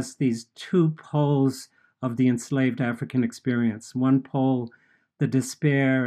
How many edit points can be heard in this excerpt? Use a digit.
0